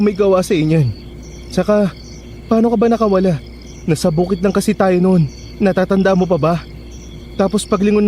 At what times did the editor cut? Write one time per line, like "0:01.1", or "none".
none